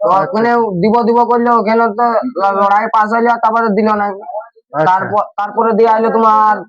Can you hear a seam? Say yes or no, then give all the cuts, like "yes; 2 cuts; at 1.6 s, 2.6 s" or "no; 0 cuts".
no; 0 cuts